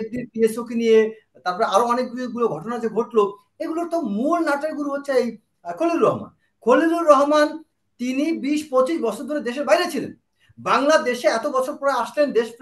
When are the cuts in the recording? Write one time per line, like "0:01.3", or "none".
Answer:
none